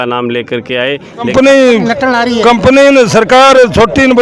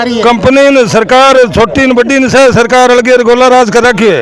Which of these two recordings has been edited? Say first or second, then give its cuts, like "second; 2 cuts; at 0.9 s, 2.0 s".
first; 1 cut; at 1.2 s